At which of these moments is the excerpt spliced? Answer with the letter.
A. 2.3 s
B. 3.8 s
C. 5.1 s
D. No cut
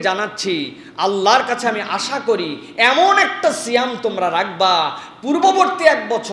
D